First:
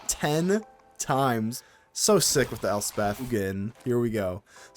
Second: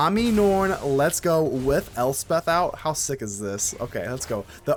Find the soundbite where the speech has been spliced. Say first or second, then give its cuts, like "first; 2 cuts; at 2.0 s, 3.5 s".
first; 2 cuts; at 1.6 s, 3.3 s